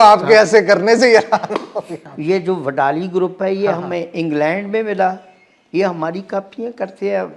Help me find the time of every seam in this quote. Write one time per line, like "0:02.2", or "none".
0:02.1